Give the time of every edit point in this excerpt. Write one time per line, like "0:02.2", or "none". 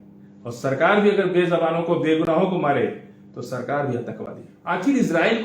0:04.5

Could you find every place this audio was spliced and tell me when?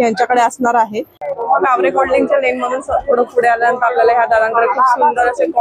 0:01.2

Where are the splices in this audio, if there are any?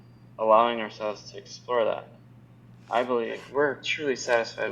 0:03.4

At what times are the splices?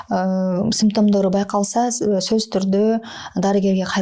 none

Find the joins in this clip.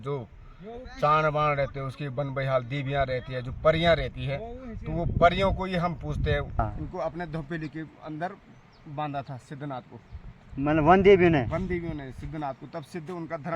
0:06.6

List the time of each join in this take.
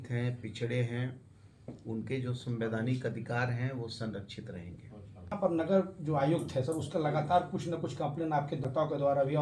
0:05.3
0:08.7

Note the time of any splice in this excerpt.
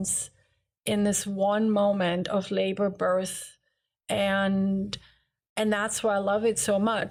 none

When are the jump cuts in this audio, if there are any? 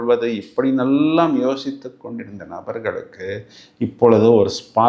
none

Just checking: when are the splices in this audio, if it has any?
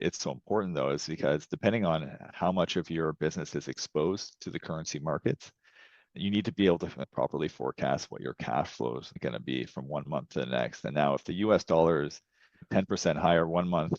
0:07.1
0:12.6

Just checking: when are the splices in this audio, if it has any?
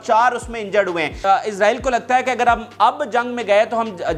0:01.2

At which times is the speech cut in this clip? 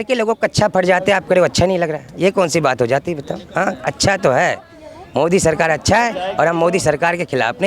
none

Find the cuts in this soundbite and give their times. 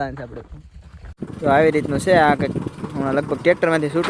0:01.2

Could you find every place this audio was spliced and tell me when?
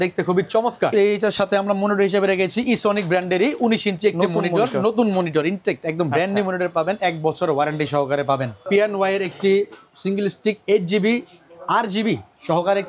0:00.9
0:08.6

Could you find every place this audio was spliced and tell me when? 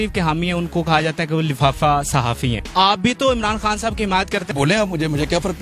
0:02.6
0:04.5

